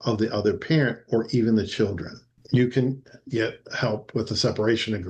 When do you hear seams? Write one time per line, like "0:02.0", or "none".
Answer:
0:02.4